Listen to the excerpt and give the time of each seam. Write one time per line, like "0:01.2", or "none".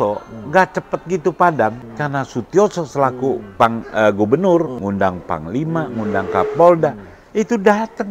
0:01.9
0:04.8